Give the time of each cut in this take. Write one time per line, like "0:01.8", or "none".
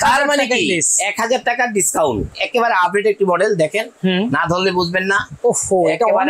0:02.3